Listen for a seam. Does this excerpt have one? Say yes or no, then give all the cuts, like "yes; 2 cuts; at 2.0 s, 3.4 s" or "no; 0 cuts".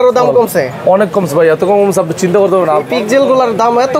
yes; 1 cut; at 2.9 s